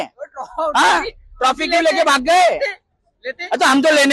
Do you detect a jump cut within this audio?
no; 0 cuts

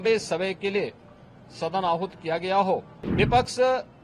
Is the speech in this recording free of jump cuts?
no; 1 cut; at 3.0 s

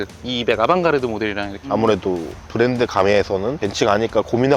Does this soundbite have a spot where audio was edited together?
yes; 2 cuts; at 1.6 s, 3.6 s

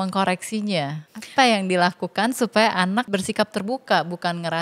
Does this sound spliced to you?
yes; 2 cuts; at 1.0 s, 3.1 s

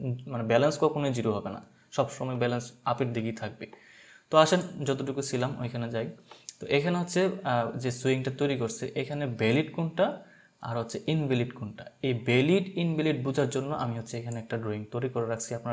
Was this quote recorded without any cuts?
yes; 0 cuts

